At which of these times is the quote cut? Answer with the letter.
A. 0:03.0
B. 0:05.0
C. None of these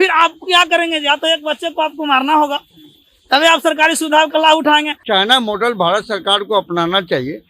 B